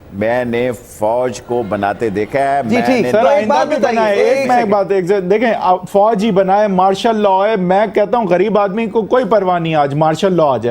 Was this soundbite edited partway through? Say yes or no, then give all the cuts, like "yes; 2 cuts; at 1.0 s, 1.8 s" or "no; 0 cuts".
no; 0 cuts